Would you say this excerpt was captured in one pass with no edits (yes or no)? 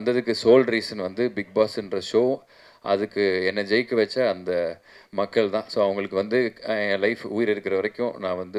yes